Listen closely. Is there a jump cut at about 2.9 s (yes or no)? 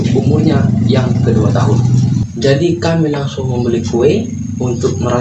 no